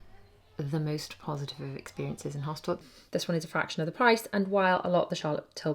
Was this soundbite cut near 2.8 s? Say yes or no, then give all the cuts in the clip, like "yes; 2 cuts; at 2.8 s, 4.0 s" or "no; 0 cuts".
yes; 1 cut; at 2.8 s